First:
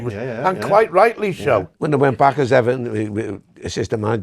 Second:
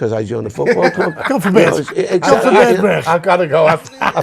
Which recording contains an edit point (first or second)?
first